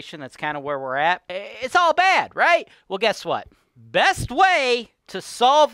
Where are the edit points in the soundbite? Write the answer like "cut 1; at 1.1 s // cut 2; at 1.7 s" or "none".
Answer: cut 1; at 1.4 s